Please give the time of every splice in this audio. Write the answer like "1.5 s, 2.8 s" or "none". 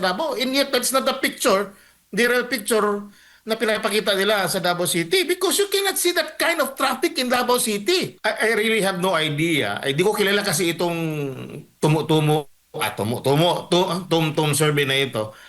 8.1 s